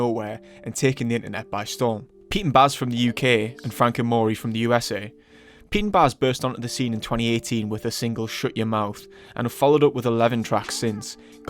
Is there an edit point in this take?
yes; 1 cut; at 7.1 s

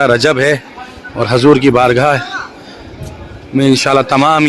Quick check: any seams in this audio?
no; 0 cuts

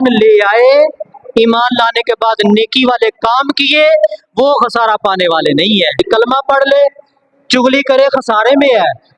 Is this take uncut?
no; 1 cut; at 6.0 s

